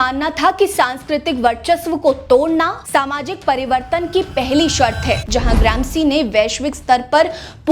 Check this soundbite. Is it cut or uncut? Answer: cut